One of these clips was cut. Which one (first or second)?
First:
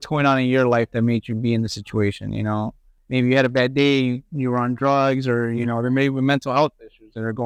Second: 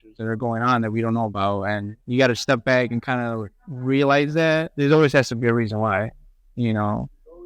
second